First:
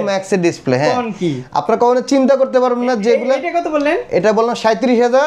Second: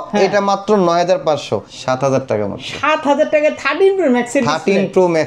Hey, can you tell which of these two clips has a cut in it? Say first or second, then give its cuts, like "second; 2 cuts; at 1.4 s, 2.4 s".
second; 1 cut; at 1.6 s